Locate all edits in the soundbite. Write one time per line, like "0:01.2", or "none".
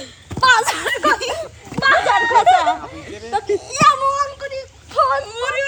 none